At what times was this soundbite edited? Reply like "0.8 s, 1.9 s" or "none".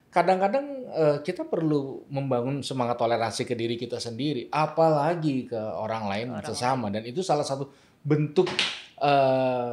none